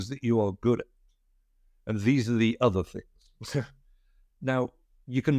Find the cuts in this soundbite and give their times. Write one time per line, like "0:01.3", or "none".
none